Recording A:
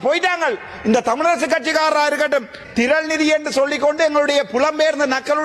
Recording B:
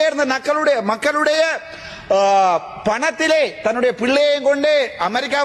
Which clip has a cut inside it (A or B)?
A